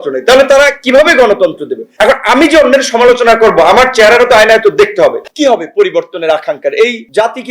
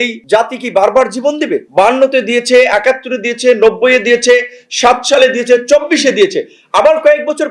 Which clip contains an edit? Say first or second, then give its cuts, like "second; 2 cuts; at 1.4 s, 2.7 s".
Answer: first; 1 cut; at 5.3 s